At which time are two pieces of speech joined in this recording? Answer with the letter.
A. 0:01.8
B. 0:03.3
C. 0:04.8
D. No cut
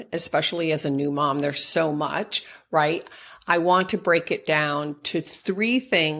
D